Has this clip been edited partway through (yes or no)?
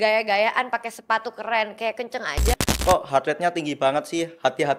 yes